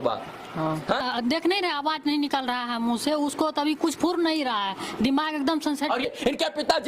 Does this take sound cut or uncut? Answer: cut